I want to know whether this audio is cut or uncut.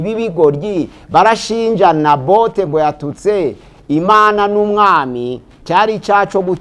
uncut